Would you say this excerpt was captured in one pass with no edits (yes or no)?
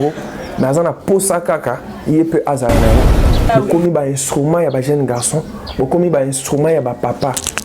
no